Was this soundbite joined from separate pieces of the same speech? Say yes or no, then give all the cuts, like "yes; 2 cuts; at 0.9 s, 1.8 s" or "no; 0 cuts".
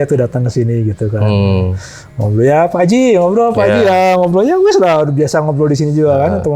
no; 0 cuts